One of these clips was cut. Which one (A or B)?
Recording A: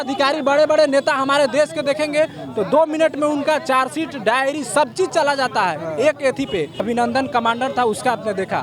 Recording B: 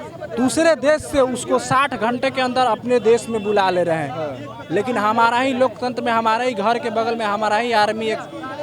A